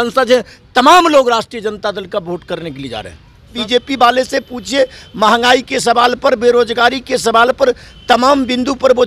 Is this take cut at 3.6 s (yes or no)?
yes